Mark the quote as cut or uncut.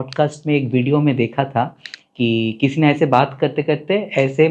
uncut